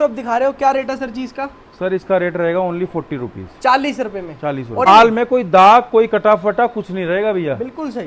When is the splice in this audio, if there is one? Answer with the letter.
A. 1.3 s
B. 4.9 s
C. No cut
B